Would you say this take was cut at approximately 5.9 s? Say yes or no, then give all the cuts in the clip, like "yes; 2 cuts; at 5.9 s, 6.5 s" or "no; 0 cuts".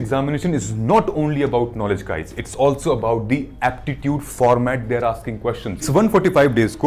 yes; 1 cut; at 5.9 s